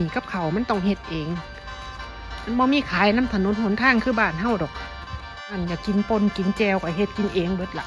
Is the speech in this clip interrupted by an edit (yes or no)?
yes